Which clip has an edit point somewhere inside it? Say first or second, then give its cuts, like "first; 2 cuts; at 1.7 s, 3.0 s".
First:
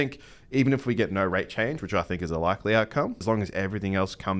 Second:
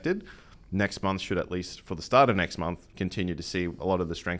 first; 1 cut; at 3.2 s